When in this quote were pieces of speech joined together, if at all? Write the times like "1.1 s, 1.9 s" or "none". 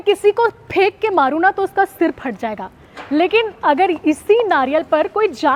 none

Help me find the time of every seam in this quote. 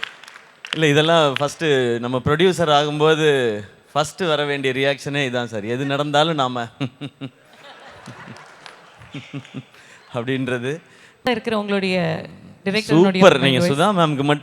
11.3 s

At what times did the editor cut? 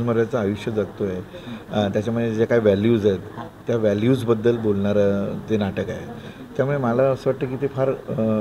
none

